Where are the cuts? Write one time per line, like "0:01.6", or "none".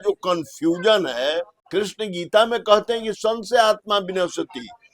0:01.5